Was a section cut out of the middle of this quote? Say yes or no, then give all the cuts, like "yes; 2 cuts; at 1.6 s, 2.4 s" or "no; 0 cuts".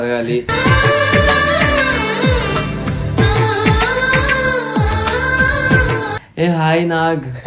yes; 1 cut; at 6.2 s